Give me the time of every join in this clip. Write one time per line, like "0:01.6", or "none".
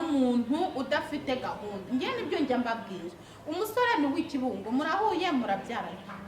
none